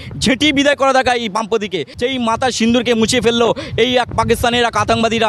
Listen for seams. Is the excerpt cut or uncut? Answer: cut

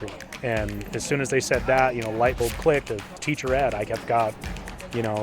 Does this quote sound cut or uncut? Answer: cut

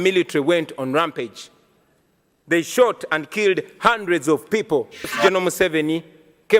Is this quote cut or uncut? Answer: cut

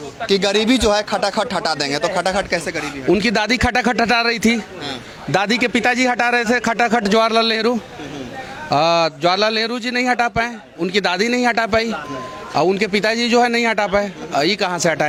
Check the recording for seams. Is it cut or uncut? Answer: uncut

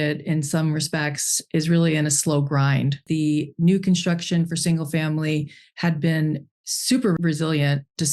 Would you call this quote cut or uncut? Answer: cut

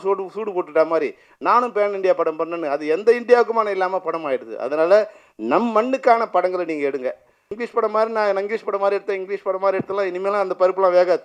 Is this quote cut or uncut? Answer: cut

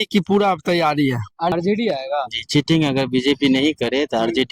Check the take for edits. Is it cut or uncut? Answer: cut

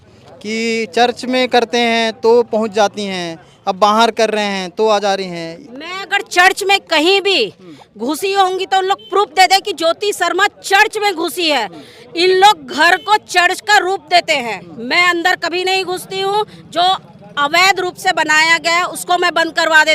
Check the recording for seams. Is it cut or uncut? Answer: uncut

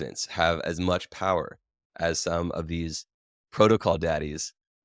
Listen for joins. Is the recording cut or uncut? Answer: uncut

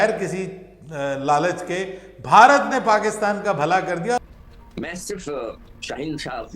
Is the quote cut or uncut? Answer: cut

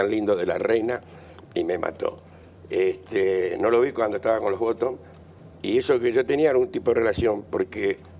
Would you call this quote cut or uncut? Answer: uncut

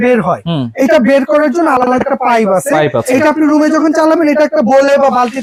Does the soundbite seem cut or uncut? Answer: uncut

